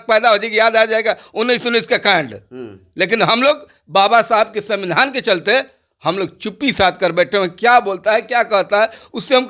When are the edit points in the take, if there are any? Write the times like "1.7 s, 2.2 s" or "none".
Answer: none